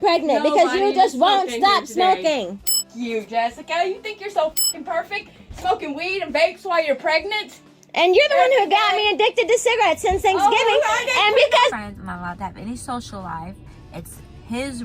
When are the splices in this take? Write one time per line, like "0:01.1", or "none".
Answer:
0:11.7